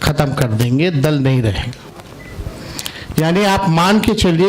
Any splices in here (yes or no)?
no